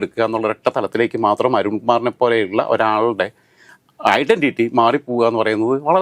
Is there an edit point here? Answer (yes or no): no